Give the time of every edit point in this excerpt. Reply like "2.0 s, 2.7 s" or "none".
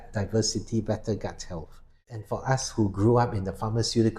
2.2 s